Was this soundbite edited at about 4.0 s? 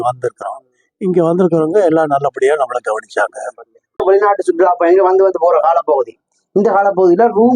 yes; 1 cut; at 4.0 s

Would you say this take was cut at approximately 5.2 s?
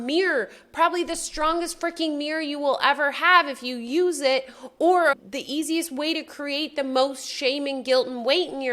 yes; 1 cut; at 5.2 s

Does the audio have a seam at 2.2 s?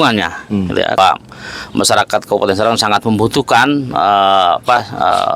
no; 1 cut; at 1.0 s

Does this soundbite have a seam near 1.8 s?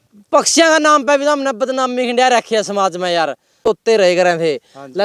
no; 1 cut; at 3.6 s

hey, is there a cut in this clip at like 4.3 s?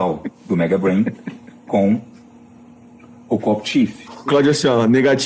yes; 1 cut; at 4.3 s

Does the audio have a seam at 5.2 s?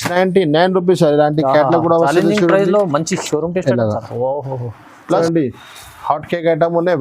yes; 1 cut; at 5.2 s

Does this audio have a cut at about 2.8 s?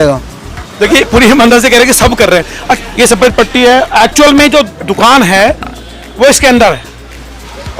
yes; 1 cut; at 2.8 s

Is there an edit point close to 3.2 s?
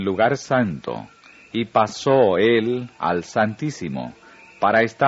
no; 0 cuts

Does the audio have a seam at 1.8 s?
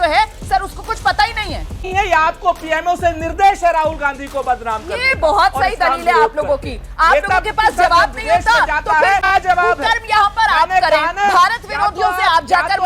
yes; 3 cuts; at 1.8 s, 6.9 s, 9.3 s

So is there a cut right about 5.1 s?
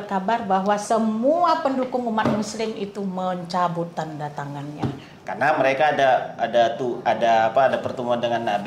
yes; 1 cut; at 5.1 s

